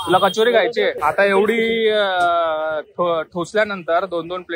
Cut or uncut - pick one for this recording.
cut